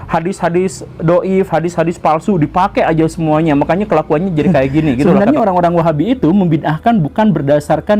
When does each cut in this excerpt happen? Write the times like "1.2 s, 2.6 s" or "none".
5.1 s